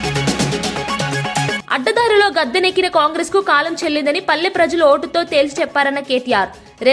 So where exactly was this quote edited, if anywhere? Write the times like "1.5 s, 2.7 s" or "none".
1.5 s